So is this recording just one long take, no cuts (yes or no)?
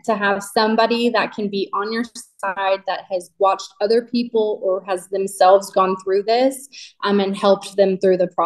yes